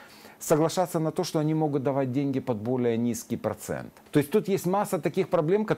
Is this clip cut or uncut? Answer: cut